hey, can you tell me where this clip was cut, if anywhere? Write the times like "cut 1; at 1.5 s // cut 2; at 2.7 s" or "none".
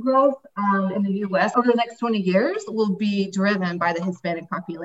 none